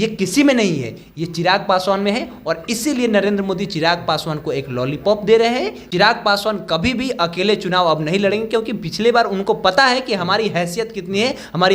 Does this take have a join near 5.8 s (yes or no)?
yes